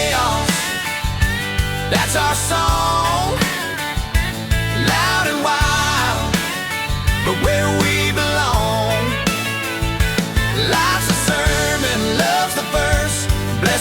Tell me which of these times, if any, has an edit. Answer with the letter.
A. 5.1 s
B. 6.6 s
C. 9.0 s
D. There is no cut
D